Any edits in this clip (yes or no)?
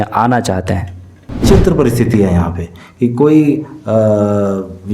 yes